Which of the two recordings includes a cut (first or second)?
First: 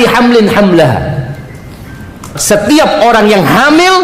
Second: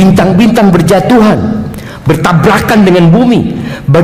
first